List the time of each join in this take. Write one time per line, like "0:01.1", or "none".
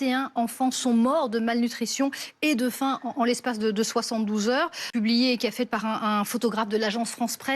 0:04.9

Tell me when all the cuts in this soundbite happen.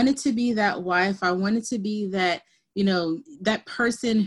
0:03.3

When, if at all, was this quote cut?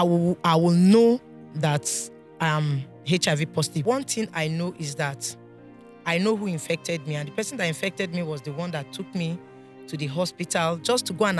0:03.8

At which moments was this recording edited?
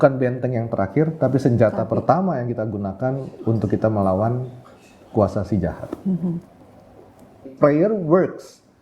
0:07.5

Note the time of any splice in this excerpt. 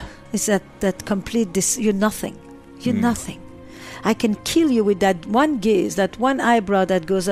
none

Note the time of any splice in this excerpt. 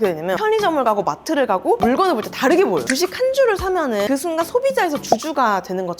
0:02.8

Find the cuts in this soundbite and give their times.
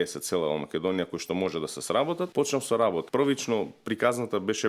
0:02.3
0:03.1

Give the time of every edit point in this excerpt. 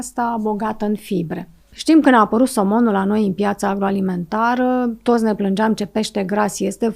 0:01.7

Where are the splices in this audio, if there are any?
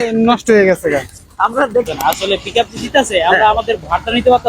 0:01.9

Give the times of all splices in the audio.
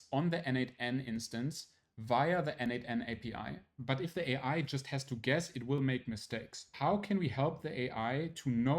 0:03.7
0:06.7

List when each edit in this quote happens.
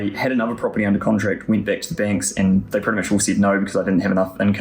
none

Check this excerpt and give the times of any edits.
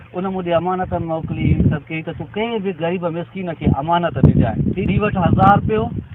0:04.8

